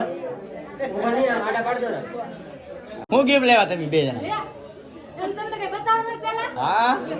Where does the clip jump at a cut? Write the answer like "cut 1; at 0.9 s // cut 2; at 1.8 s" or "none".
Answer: cut 1; at 3.0 s